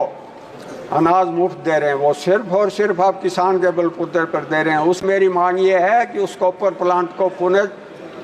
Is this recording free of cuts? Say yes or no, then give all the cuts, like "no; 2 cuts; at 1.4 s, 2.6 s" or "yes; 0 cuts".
no; 1 cut; at 5.0 s